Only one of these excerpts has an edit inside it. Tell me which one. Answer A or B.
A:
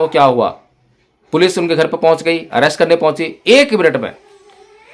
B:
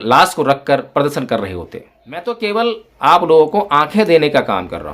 B